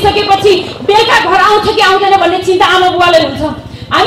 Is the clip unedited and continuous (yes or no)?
yes